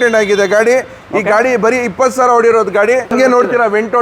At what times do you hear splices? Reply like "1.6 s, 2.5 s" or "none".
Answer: 3.1 s